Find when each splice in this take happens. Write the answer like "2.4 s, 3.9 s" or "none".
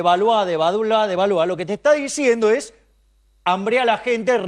none